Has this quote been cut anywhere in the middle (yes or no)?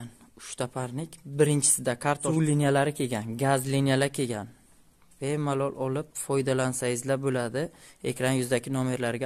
yes